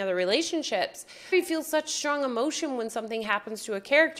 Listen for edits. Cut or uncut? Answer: cut